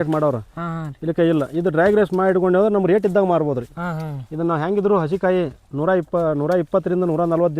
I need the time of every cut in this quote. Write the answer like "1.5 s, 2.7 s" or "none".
none